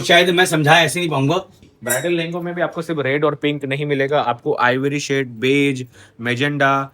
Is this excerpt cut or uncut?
cut